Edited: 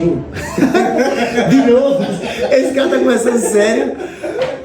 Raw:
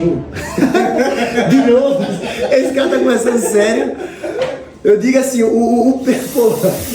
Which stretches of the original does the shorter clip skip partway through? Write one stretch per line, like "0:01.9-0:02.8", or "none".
none